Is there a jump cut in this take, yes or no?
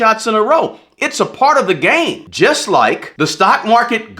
yes